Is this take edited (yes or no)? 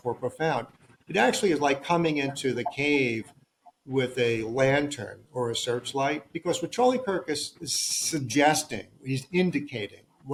no